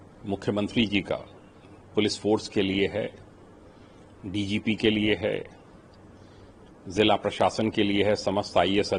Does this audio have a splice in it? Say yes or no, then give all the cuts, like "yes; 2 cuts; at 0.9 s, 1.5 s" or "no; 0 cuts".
no; 0 cuts